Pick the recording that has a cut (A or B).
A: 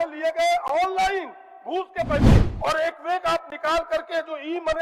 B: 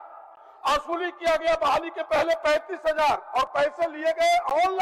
A